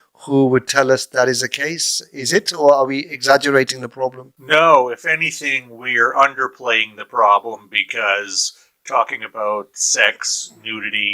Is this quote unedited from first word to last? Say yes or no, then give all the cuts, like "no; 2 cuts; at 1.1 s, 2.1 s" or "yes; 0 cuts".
no; 1 cut; at 4.3 s